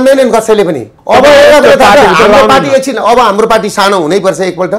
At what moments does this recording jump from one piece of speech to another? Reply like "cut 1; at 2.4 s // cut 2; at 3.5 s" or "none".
cut 1; at 0.9 s